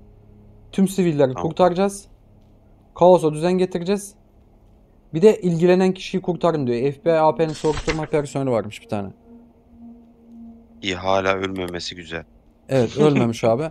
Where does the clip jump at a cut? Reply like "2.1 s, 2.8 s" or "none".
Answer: none